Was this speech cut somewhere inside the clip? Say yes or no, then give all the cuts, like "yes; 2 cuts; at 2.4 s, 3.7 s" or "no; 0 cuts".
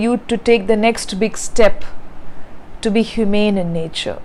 no; 0 cuts